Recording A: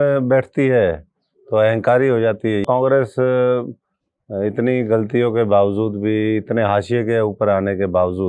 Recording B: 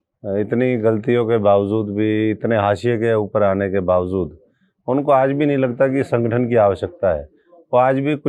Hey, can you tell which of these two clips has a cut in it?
A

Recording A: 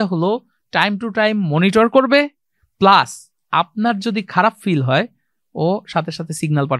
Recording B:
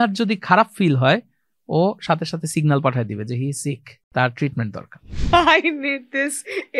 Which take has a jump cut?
B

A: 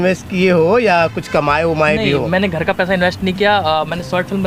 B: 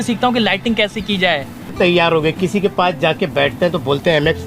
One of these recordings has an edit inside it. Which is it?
B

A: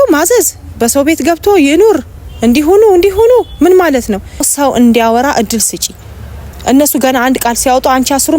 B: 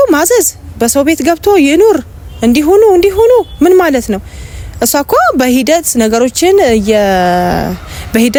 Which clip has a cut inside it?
A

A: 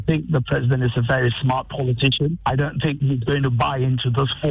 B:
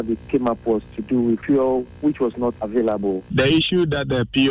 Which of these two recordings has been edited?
B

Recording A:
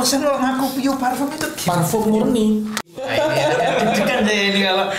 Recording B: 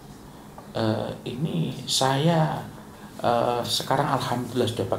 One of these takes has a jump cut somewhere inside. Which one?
A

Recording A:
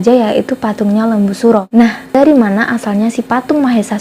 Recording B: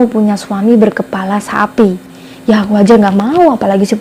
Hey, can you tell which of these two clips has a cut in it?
A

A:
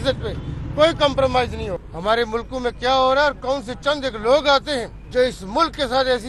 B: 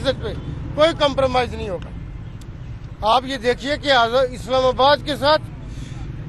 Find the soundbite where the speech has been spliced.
A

